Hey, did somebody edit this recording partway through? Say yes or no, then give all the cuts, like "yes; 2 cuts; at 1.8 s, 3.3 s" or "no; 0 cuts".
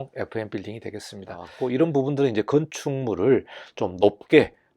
yes; 1 cut; at 1.5 s